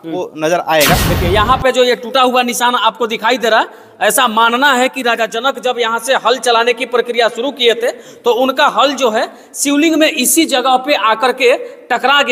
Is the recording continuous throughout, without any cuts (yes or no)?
no